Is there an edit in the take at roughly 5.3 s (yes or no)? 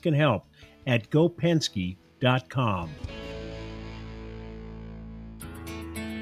yes